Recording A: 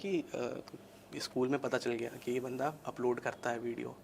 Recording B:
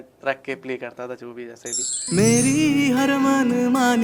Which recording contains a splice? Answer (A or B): B